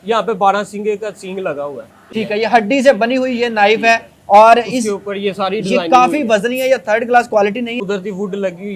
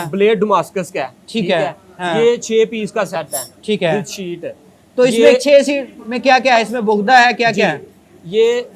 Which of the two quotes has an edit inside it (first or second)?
first